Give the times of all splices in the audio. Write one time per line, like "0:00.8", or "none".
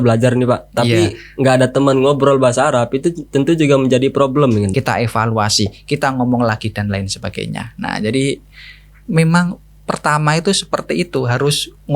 0:04.7